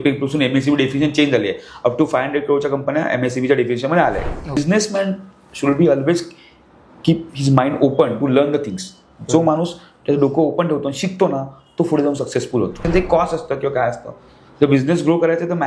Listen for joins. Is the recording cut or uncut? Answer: cut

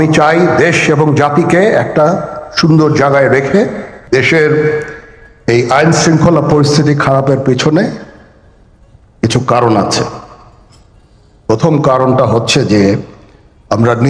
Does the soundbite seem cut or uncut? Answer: cut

